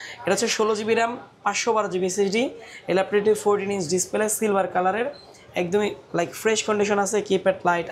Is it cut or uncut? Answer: uncut